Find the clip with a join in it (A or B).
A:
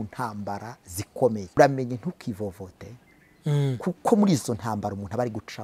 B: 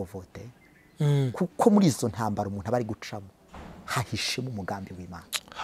A